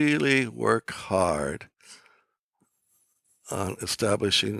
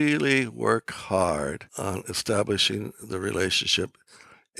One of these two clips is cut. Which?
second; 1 cut; at 1.7 s

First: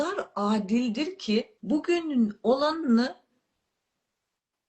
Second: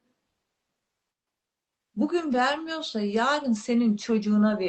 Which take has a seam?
first; 1 cut; at 1.5 s

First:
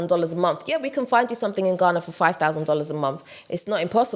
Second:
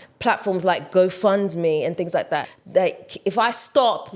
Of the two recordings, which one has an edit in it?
second; 1 cut; at 2.6 s

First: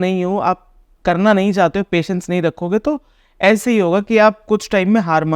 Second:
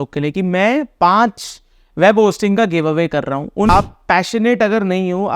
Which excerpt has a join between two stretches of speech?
second; 1 cut; at 3.7 s

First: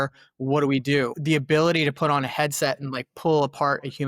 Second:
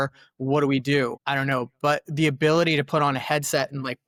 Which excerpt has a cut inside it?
first; 1 cut; at 1.2 s

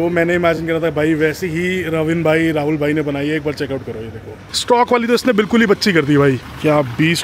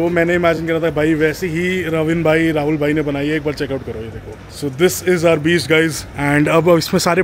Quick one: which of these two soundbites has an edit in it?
first; 2 cuts; at 4.5 s, 6.4 s

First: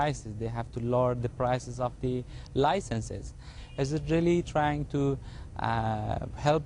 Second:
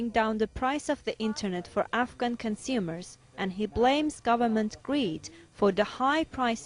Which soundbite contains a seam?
second; 1 cut; at 2.1 s

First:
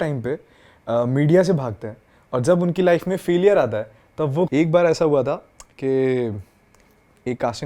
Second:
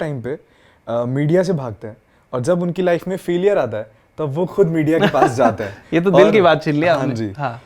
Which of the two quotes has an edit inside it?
first; 1 cut; at 4.5 s

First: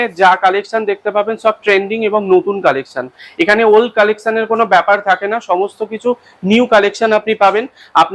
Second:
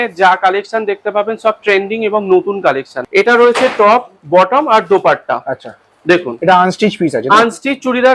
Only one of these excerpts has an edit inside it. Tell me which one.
second; 1 cut; at 3.0 s

